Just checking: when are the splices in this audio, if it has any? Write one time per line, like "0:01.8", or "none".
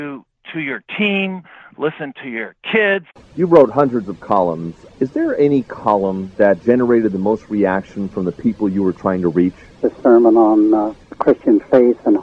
0:03.2